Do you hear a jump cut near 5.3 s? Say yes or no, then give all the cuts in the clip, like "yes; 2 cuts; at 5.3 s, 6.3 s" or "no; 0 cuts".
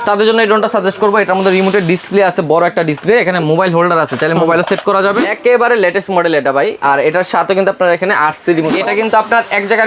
yes; 2 cuts; at 5.3 s, 8.7 s